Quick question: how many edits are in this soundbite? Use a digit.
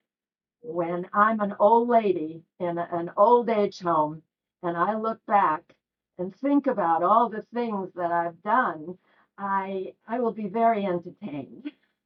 0